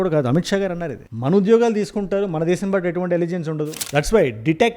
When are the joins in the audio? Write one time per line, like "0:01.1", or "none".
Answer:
0:03.7